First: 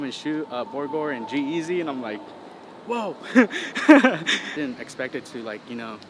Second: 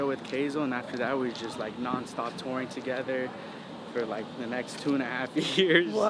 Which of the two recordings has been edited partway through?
first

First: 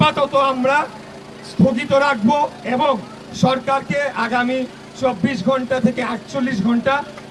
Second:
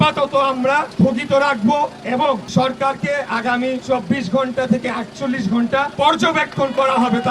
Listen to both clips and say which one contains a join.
second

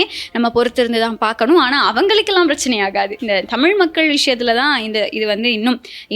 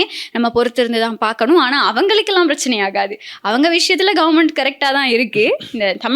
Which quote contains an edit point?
first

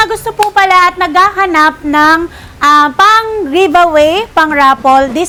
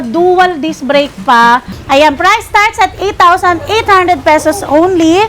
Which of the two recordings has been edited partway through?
second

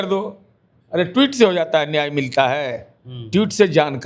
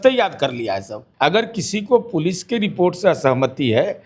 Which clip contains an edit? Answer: second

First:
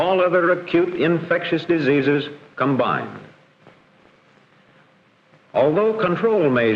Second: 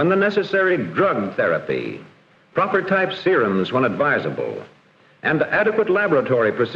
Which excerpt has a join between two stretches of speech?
first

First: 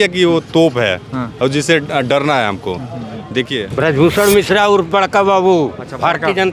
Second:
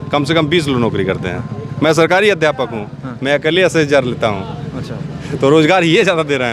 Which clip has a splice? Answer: first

